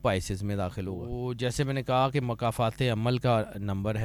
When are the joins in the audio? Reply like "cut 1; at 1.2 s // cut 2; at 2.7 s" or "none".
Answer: cut 1; at 1.1 s